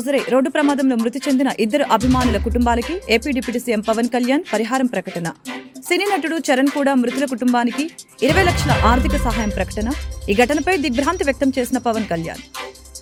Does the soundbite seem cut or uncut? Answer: uncut